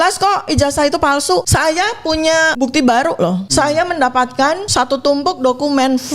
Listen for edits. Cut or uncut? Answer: cut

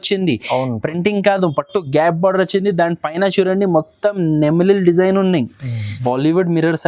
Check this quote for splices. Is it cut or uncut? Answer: cut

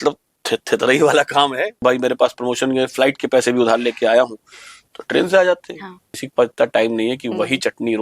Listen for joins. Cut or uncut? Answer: cut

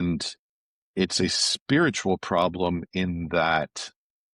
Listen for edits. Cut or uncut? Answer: uncut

